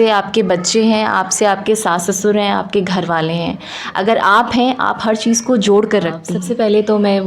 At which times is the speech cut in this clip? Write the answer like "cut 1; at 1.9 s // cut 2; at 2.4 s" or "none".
cut 1; at 6.3 s